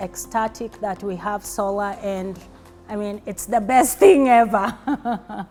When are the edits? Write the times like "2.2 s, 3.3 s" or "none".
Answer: none